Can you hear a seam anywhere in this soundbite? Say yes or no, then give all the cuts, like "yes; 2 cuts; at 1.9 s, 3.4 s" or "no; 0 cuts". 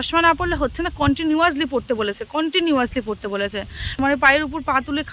yes; 1 cut; at 3.9 s